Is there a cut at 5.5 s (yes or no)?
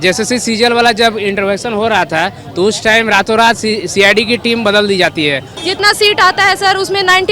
yes